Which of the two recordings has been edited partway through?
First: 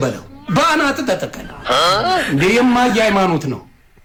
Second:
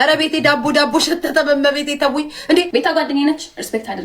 second; 1 cut; at 2.7 s

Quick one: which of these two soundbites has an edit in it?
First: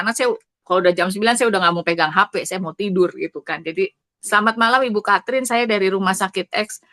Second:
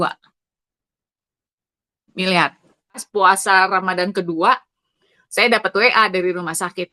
second; 1 cut; at 3.1 s

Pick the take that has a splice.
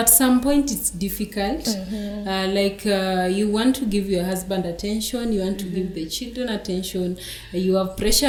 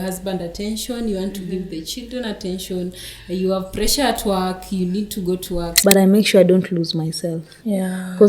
second; 1 cut; at 5.7 s

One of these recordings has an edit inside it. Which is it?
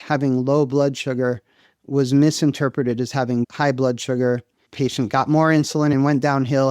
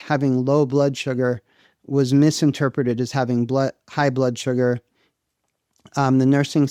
first; 3 cuts; at 3.5 s, 4.7 s, 6.0 s

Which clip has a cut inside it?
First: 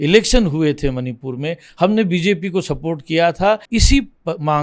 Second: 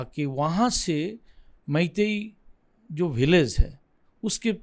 first; 1 cut; at 3.6 s

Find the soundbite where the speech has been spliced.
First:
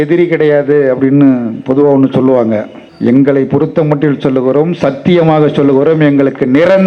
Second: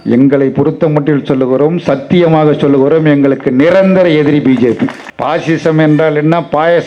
second; 1 cut; at 5.1 s

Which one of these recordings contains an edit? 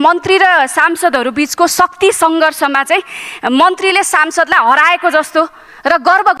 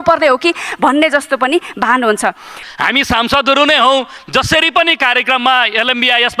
second; 1 cut; at 2.6 s

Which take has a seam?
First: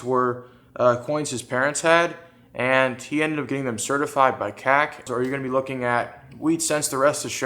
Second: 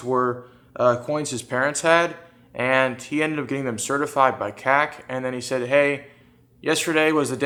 first; 1 cut; at 5.0 s

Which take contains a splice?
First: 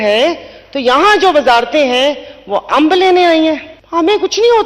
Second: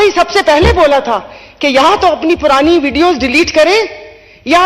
first; 1 cut; at 3.7 s

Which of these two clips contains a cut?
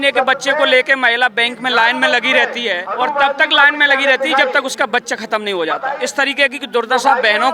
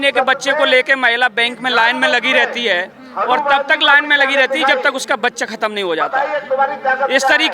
first; 2 cuts; at 2.8 s, 6.0 s

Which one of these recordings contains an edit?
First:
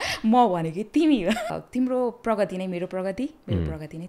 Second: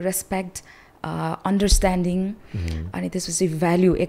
first; 1 cut; at 1.4 s

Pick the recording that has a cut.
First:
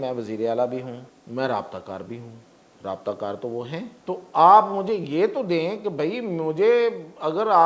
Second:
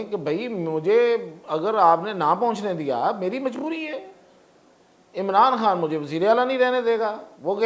first; 2 cuts; at 1.1 s, 3.9 s

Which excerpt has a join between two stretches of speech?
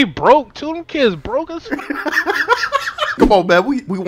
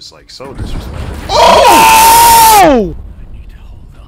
first; 1 cut; at 3.2 s

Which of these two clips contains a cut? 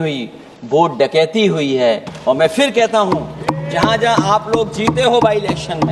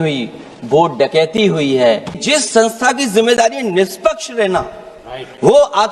second; 1 cut; at 2.1 s

